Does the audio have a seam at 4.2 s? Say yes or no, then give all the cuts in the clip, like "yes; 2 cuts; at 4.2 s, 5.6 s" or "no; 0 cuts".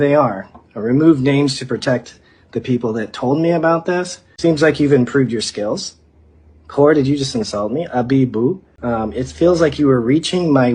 yes; 2 cuts; at 4.2 s, 8.7 s